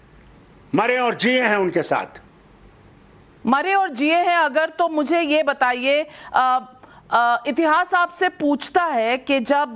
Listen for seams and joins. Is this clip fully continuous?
yes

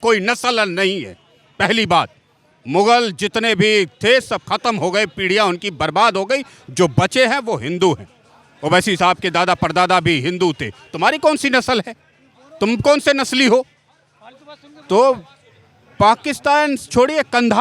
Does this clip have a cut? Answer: no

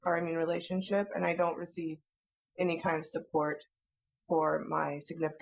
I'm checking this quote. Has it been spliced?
no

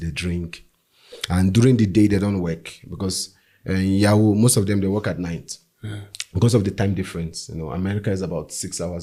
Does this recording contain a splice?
no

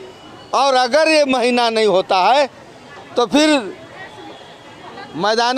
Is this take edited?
no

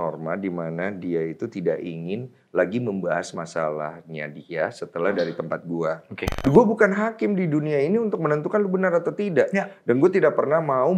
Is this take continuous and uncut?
no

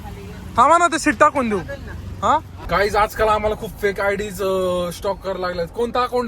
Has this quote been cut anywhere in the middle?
yes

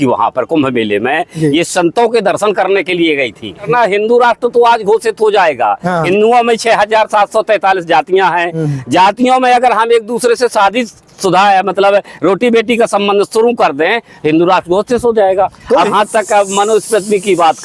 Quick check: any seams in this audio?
yes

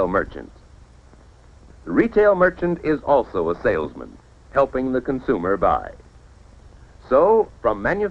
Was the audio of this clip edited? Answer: yes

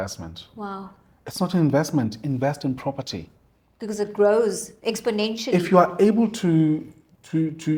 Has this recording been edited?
no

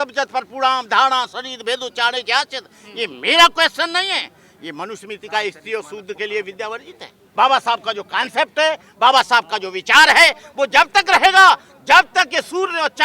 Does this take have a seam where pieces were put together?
yes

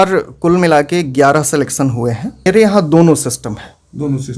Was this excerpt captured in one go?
no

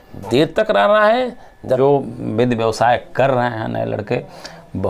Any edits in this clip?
yes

